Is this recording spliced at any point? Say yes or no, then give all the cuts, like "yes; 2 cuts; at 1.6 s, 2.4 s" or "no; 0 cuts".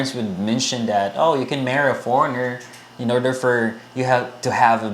no; 0 cuts